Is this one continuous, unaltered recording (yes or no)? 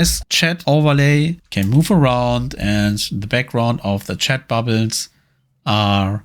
no